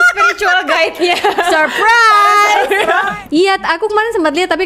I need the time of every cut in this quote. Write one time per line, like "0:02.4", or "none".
0:03.1